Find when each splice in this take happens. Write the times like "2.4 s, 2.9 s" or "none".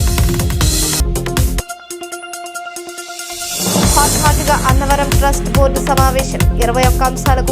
0.9 s

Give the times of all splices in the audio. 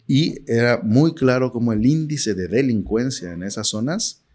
none

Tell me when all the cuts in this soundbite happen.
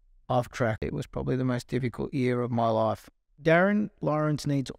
0.8 s, 3.4 s

